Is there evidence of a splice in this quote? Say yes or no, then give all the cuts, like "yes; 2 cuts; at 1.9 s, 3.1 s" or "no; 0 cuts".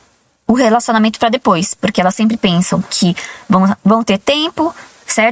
no; 0 cuts